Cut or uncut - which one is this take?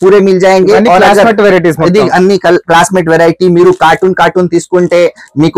uncut